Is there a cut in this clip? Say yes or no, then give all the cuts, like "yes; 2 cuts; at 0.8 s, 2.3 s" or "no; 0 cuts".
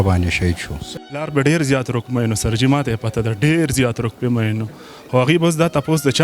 yes; 1 cut; at 1.3 s